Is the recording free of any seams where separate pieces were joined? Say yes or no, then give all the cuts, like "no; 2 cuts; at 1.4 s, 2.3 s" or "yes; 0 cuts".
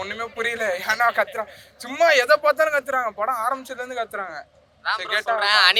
yes; 0 cuts